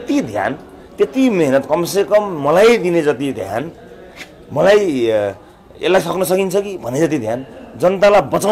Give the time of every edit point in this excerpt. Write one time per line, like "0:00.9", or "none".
none